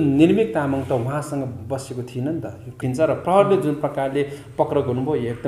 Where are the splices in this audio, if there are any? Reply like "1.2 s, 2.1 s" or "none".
2.8 s